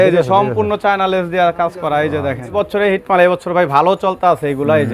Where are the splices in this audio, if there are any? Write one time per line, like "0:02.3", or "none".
0:02.6